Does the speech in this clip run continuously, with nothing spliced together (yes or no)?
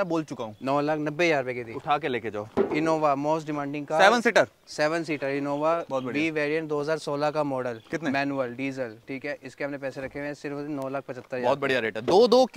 yes